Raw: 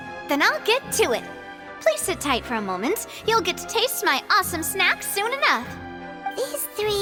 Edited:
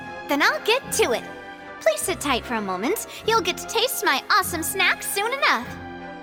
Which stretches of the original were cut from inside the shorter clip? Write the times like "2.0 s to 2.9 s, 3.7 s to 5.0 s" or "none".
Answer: none